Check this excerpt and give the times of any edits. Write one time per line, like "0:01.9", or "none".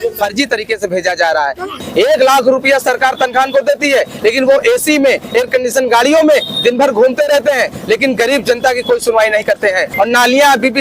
0:01.8
0:09.9